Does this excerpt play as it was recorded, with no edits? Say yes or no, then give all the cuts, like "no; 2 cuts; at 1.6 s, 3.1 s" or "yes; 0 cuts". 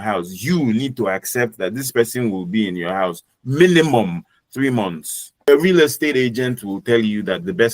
no; 1 cut; at 5.5 s